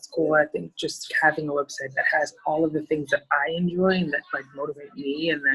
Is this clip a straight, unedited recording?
no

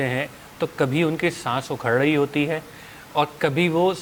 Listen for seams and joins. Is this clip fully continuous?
yes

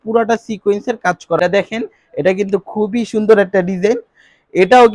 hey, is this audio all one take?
no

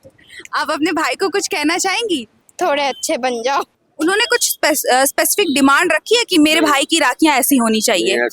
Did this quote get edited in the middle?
yes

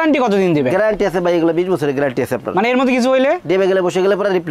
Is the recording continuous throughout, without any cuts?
yes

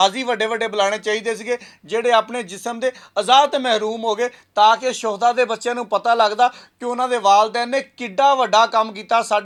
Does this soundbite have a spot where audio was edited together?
no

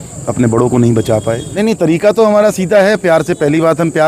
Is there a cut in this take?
yes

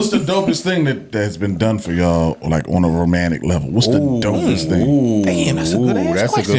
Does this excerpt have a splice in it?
no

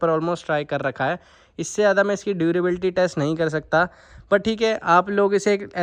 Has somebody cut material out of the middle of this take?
no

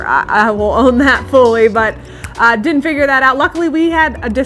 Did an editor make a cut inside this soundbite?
no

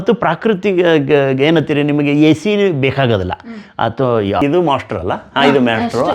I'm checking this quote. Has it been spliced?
yes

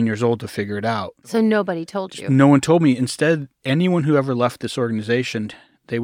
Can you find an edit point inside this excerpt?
yes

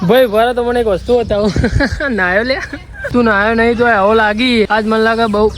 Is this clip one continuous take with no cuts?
no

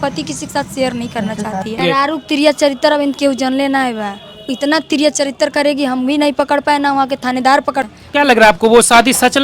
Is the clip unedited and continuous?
no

